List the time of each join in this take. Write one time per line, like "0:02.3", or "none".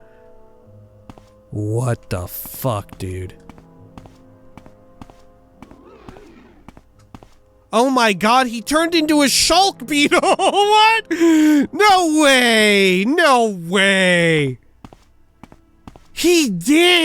0:16.1